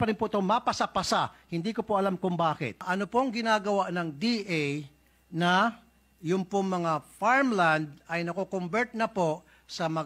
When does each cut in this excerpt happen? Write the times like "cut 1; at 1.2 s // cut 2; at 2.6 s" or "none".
cut 1; at 2.9 s